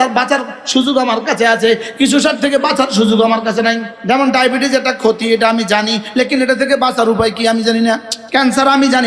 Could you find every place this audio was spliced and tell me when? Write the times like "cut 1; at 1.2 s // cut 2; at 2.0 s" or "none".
cut 1; at 3.9 s // cut 2; at 8.1 s